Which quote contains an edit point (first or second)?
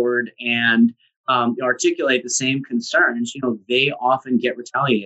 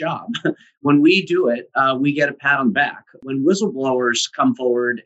second